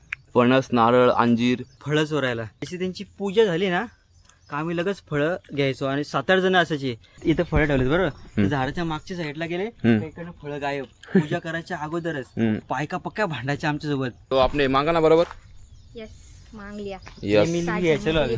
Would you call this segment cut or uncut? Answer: cut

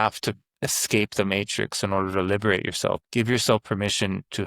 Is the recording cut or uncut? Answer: cut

